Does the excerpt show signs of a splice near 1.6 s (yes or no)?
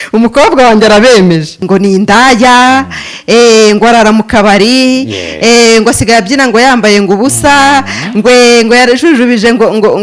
yes